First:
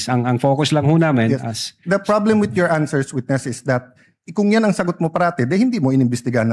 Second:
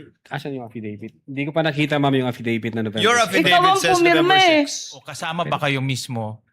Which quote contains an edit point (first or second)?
second